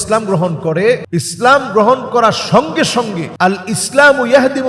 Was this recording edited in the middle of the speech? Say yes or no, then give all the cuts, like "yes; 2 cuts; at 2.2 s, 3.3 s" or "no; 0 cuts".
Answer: yes; 2 cuts; at 1.0 s, 3.2 s